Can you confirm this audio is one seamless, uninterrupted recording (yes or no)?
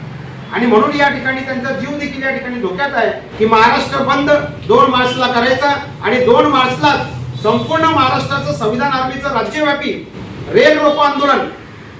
no